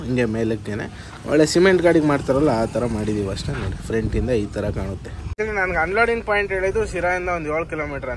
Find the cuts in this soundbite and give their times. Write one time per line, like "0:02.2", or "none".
0:05.3